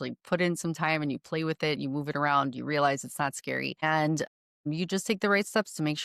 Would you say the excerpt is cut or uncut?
uncut